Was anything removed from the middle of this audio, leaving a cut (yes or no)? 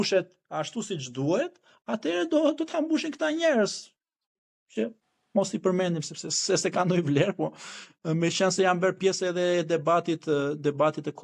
no